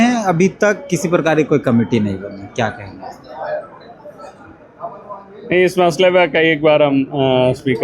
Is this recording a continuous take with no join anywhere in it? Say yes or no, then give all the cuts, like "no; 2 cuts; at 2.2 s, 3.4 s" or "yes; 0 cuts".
yes; 0 cuts